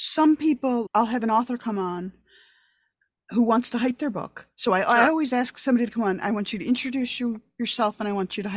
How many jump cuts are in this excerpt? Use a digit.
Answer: 0